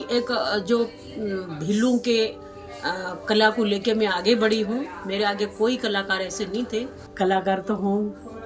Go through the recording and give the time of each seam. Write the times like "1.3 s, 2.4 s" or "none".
7.0 s